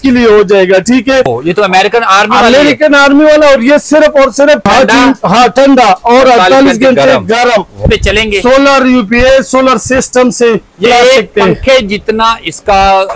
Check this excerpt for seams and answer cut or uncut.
cut